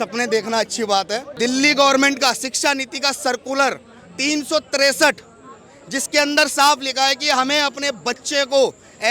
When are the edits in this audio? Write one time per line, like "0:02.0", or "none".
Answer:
0:01.3

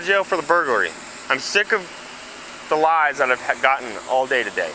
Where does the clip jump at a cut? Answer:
0:01.2

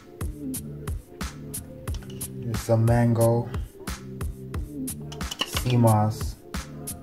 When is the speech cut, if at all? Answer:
0:01.0
0:02.5
0:03.5
0:05.7

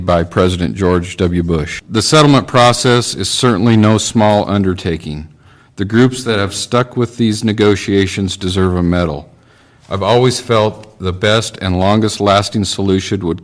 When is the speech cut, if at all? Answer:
0:01.8

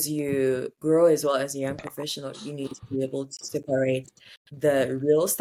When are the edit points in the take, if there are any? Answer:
none

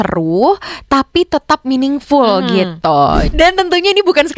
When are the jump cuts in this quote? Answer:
0:03.3

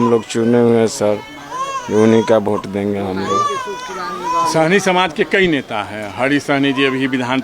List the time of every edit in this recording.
none

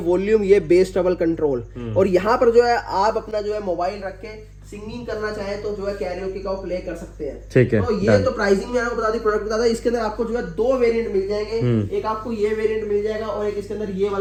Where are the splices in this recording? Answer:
none

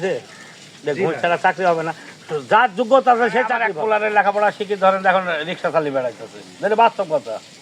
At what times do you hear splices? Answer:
0:03.7

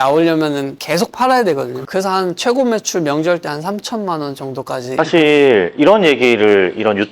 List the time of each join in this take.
0:01.7
0:04.8

